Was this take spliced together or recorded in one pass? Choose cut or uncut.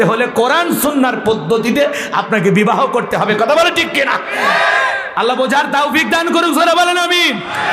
uncut